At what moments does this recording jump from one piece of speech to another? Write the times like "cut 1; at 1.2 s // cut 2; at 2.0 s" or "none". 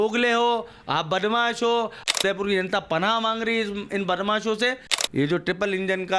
cut 1; at 2.2 s // cut 2; at 5.0 s